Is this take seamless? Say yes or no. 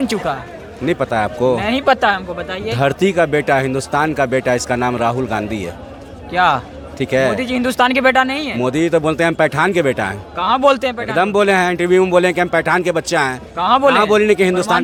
yes